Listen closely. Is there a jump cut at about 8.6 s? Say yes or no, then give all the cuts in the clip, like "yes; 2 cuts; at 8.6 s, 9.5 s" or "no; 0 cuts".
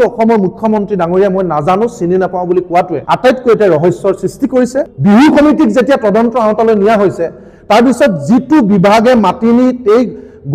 no; 2 cuts; at 3.0 s, 4.9 s